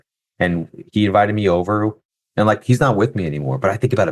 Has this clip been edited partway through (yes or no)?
yes